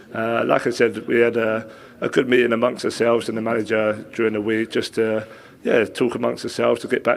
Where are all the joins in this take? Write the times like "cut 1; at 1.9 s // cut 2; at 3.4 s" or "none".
none